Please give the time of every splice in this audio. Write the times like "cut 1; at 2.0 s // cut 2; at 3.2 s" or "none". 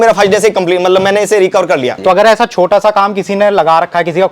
cut 1; at 1.9 s